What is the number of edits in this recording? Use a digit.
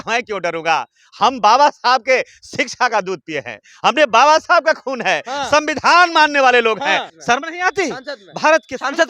1